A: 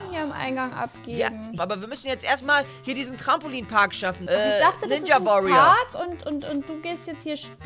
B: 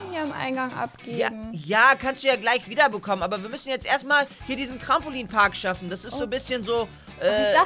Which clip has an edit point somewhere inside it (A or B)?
A